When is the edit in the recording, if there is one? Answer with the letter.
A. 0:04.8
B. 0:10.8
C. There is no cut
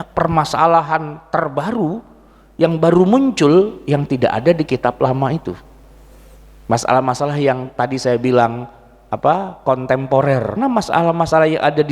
B